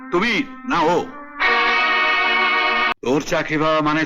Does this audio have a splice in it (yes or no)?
yes